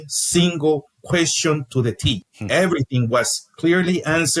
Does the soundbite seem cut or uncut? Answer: cut